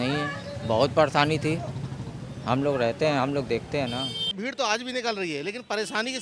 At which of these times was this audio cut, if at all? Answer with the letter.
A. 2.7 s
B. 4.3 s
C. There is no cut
B